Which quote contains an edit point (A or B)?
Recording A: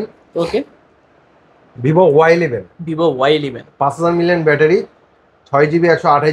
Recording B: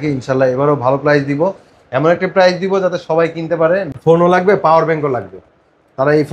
B